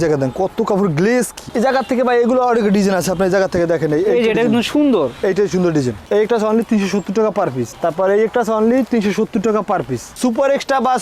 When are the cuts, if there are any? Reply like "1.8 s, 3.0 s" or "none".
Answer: 1.4 s, 6.0 s, 10.1 s